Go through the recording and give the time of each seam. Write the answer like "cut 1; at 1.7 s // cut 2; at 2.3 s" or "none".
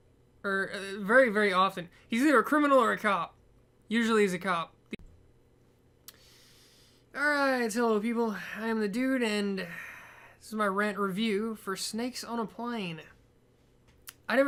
none